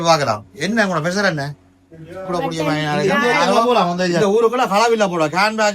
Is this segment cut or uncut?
cut